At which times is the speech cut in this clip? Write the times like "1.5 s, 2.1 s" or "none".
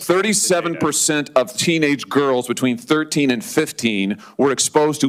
none